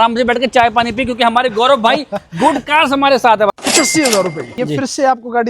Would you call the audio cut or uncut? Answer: cut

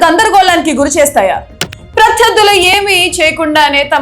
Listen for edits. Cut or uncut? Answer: cut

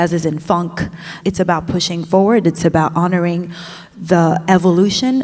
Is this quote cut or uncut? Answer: cut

